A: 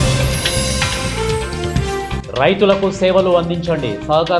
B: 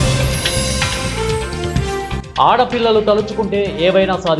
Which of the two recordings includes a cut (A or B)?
B